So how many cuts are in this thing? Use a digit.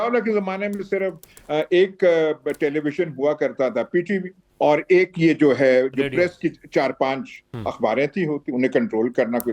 1